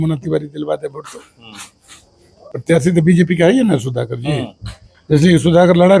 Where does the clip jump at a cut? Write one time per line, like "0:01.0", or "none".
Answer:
0:02.3

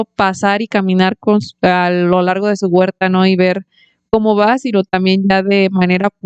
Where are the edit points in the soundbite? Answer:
none

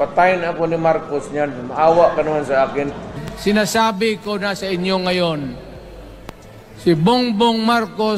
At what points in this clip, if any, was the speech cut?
0:03.2

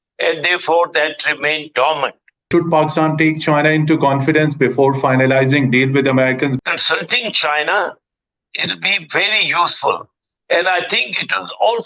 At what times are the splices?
0:02.5
0:06.6

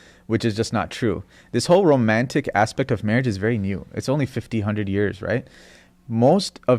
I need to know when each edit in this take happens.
none

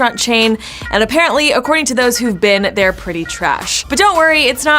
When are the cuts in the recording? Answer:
0:03.7

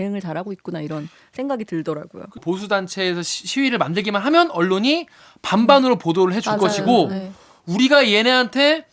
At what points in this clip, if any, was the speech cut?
0:02.4

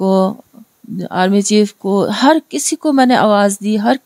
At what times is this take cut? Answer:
none

